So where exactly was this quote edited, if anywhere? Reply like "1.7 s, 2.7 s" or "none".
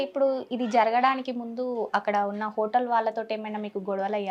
none